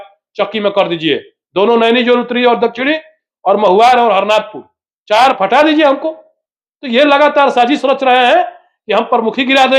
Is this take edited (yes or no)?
yes